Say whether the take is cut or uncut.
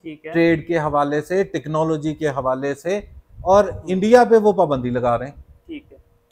uncut